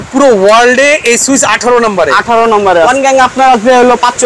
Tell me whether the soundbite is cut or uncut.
cut